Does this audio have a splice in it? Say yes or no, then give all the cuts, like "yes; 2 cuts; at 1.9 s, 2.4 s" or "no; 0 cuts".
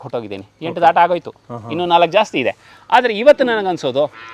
no; 0 cuts